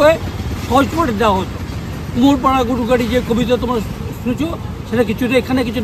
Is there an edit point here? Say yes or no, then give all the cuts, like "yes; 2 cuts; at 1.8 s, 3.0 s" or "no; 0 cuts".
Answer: no; 0 cuts